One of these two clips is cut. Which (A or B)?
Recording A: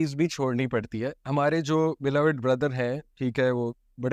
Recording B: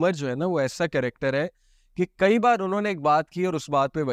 A